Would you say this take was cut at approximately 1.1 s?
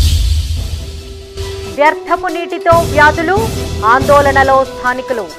yes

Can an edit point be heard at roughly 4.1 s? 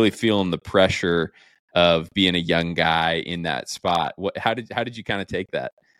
no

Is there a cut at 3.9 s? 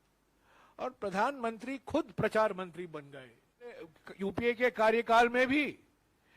yes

